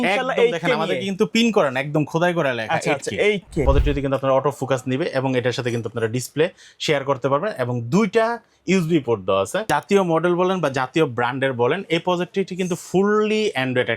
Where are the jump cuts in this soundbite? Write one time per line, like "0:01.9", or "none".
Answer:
0:03.6
0:09.6